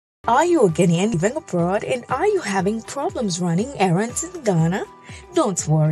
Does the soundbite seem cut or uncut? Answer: cut